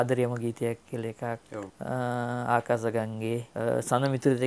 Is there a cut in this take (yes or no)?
yes